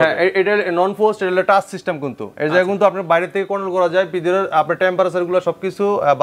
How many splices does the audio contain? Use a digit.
0